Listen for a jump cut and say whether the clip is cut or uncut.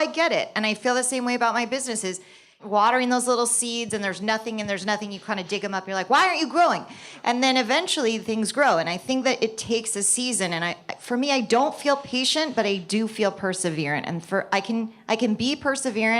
cut